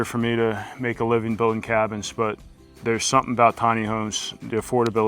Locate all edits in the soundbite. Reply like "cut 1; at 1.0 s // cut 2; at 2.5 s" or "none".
none